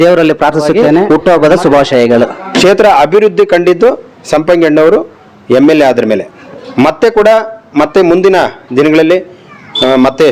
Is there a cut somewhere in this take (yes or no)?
yes